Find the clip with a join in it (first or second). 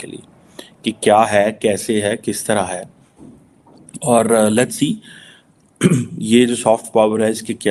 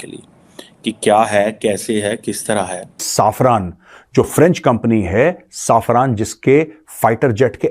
second